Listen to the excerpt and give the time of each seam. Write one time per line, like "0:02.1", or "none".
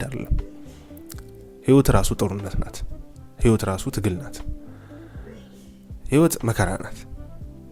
none